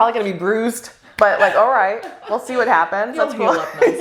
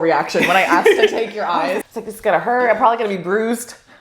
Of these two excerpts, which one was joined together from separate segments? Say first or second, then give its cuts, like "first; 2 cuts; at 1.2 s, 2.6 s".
second; 1 cut; at 1.9 s